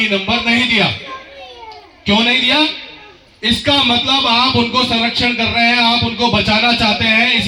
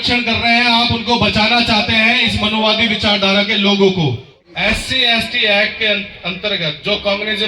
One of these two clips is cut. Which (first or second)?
second